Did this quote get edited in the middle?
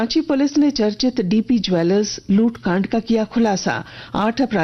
no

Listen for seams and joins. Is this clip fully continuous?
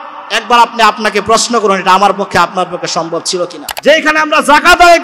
no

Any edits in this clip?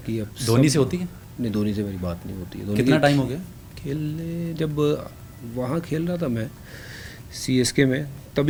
no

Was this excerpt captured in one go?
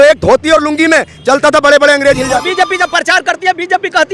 no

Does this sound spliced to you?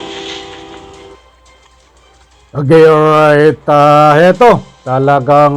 no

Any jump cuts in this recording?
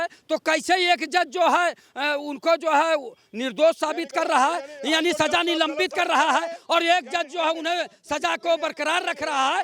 no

